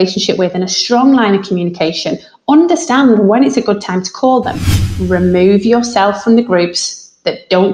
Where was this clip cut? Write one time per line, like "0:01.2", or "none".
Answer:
0:04.9